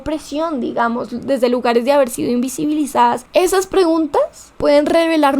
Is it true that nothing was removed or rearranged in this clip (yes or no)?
no